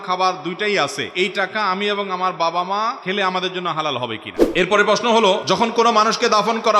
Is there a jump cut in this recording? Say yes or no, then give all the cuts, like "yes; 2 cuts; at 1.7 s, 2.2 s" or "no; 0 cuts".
yes; 4 cuts; at 1.0 s, 3.0 s, 4.3 s, 5.4 s